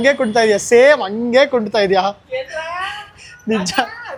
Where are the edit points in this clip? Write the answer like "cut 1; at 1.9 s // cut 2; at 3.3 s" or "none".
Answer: none